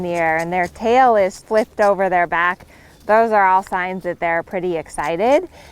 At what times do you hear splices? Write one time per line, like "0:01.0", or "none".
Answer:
0:01.4